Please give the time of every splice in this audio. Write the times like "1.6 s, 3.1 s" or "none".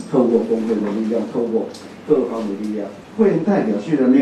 3.0 s